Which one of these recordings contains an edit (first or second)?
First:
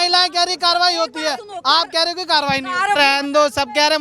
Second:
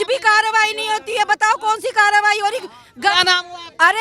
first